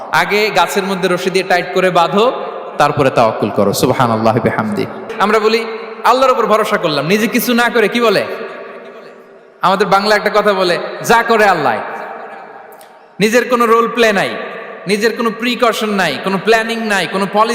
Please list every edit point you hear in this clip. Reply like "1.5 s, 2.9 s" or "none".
5.1 s